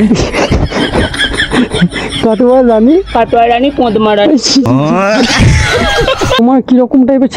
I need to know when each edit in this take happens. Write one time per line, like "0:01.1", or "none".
0:06.4